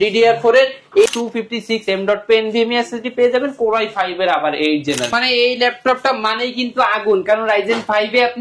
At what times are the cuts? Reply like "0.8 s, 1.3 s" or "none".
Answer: 1.1 s, 5.1 s